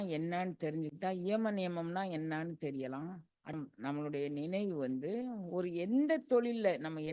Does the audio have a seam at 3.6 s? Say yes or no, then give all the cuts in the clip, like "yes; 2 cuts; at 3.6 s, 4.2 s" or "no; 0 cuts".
yes; 1 cut; at 3.6 s